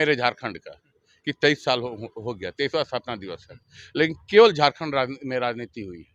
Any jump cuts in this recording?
no; 0 cuts

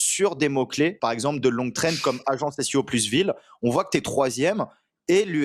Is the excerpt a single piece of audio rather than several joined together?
no; 1 cut; at 1.0 s

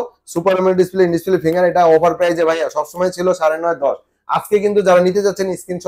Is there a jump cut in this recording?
no; 0 cuts

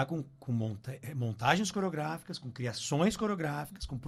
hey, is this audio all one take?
yes; 0 cuts

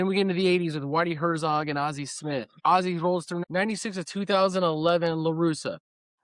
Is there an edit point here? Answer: yes; 2 cuts; at 2.5 s, 3.4 s

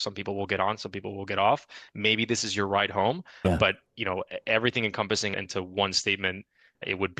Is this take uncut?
no; 1 cut; at 5.4 s

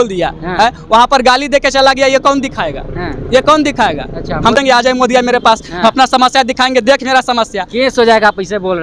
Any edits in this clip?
no; 0 cuts

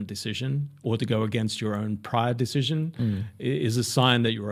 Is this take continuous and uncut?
yes; 0 cuts

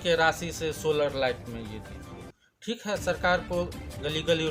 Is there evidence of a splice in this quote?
no; 0 cuts

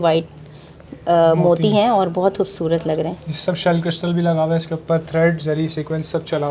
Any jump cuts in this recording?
no; 0 cuts

